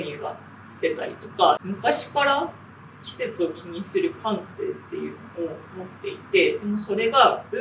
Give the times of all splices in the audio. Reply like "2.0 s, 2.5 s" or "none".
1.6 s